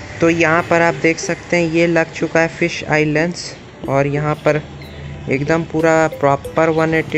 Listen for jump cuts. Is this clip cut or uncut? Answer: uncut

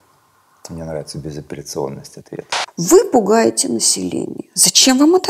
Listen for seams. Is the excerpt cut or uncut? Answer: cut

